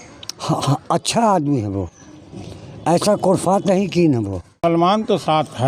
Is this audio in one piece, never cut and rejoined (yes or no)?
no